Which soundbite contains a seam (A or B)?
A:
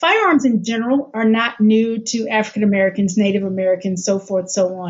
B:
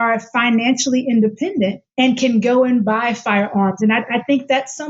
B